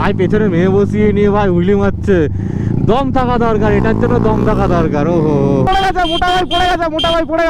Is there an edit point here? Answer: yes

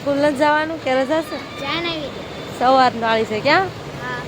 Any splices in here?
no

